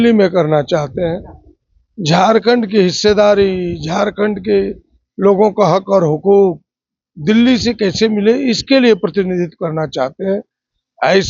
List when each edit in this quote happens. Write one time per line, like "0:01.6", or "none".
none